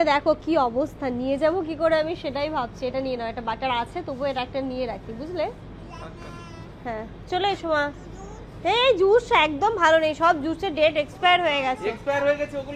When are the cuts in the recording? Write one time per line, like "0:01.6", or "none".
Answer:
none